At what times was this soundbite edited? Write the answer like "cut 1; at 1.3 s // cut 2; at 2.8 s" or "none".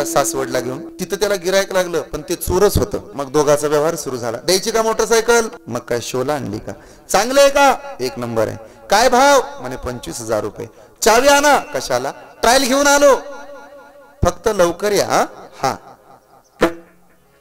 cut 1; at 0.9 s // cut 2; at 3.1 s // cut 3; at 5.6 s